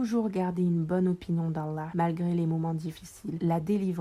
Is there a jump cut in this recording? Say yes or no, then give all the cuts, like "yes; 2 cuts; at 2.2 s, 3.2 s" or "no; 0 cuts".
no; 0 cuts